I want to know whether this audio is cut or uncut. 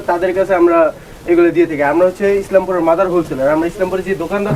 uncut